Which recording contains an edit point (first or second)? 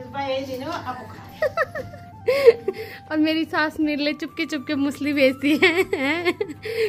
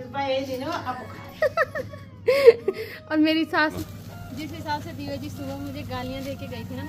second